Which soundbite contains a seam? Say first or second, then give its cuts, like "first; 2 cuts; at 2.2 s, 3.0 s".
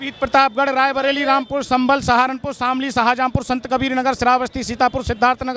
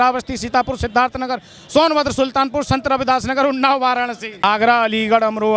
second; 1 cut; at 4.4 s